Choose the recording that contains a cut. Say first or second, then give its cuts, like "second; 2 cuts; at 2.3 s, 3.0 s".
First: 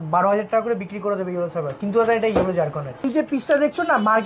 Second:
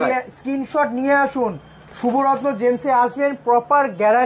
first; 1 cut; at 3.1 s